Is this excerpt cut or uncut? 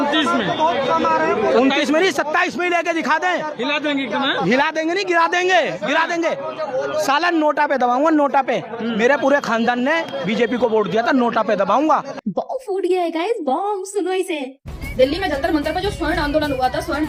uncut